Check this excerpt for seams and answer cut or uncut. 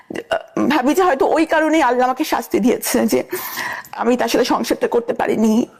uncut